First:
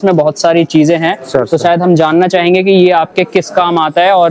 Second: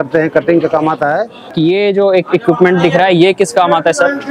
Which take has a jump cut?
second; 1 cut; at 1.5 s

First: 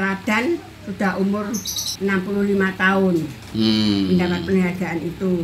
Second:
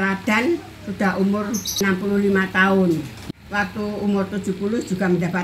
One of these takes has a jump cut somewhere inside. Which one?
second; 2 cuts; at 1.7 s, 3.2 s

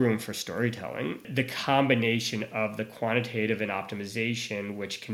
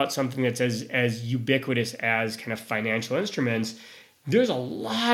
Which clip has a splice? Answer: first; 1 cut; at 1.2 s

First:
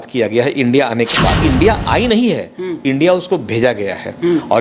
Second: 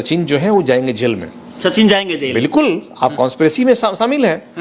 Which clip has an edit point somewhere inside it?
first; 1 cut; at 1.4 s

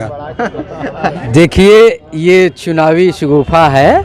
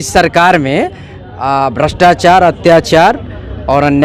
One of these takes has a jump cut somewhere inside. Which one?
first; 1 cut; at 1.2 s

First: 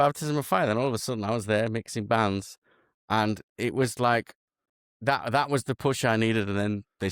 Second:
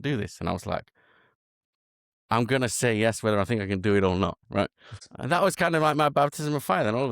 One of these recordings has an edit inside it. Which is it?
second; 1 cut; at 5.0 s

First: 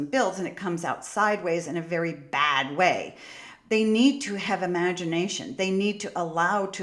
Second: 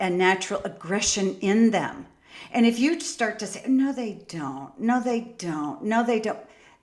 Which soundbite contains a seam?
first; 1 cut; at 3.5 s

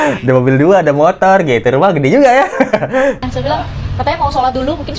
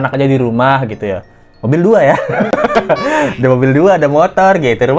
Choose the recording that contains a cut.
first; 1 cut; at 3.2 s

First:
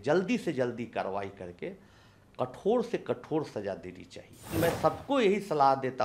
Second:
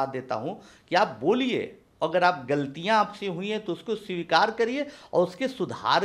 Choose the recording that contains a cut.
first; 1 cut; at 4.5 s

